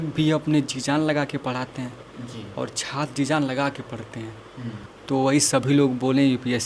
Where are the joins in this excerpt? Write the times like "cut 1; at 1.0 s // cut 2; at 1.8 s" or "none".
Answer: cut 1; at 4.8 s